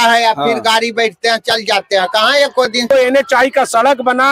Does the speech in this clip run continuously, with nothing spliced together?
no; 1 cut; at 2.8 s

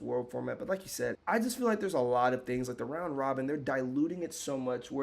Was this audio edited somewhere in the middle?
yes; 1 cut; at 1.2 s

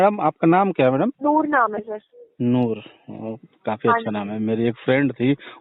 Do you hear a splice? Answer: yes; 1 cut; at 1.2 s

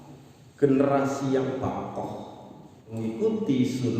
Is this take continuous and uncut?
no; 1 cut; at 2.9 s

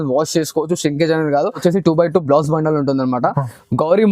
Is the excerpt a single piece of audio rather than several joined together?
no; 1 cut; at 1.6 s

